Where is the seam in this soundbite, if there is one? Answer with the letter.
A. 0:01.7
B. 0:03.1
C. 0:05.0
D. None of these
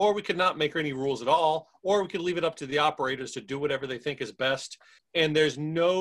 C